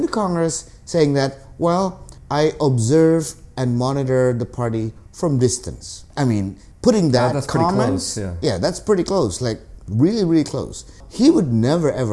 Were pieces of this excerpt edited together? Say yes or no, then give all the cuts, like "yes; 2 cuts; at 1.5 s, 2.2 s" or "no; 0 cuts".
no; 0 cuts